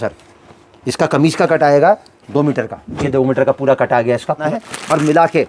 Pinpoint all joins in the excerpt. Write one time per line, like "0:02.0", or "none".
0:04.4